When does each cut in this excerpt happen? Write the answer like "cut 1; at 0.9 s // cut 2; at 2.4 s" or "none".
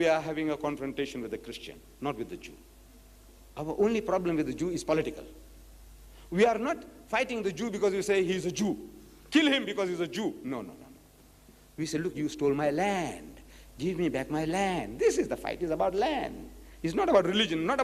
cut 1; at 7.5 s